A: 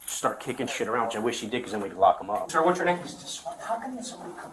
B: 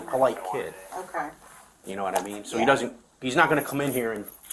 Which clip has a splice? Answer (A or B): A